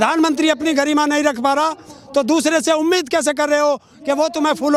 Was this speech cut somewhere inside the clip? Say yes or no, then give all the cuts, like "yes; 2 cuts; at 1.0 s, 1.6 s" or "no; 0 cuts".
no; 0 cuts